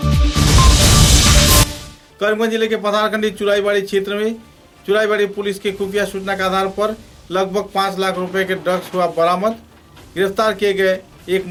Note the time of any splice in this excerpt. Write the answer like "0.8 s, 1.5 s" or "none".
none